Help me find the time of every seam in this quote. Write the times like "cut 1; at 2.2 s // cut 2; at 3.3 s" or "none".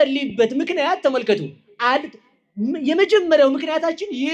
none

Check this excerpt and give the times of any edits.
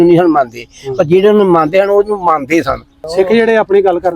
cut 1; at 2.9 s

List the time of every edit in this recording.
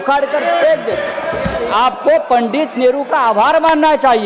cut 1; at 1.7 s

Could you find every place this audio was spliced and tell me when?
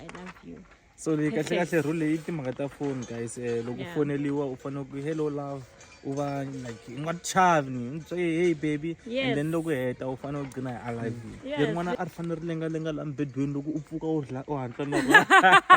cut 1; at 11.6 s

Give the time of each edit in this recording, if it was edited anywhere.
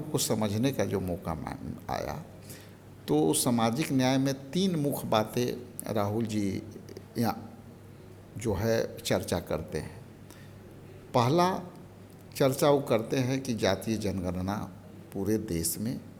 none

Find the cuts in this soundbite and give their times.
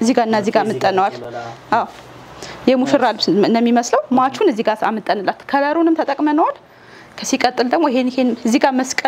none

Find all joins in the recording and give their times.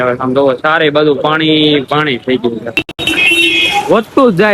cut 1; at 2.9 s

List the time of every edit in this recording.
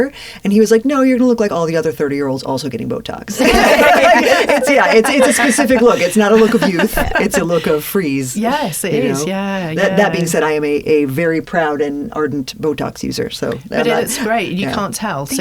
none

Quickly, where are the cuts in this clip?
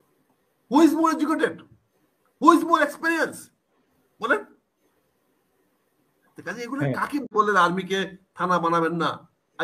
cut 1; at 7.3 s

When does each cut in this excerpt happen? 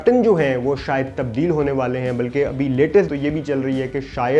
none

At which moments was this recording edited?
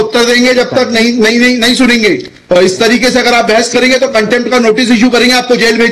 none

